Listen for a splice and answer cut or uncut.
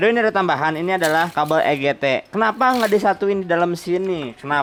uncut